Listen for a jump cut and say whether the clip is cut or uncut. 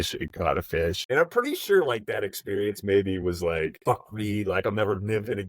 cut